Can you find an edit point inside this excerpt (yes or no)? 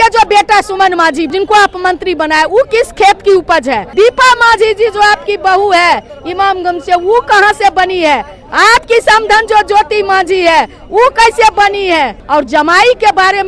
yes